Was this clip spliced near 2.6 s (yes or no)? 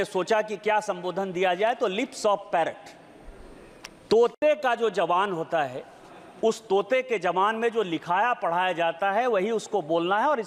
no